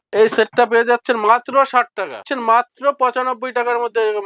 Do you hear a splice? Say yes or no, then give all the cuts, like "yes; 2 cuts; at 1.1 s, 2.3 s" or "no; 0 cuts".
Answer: yes; 1 cut; at 2.3 s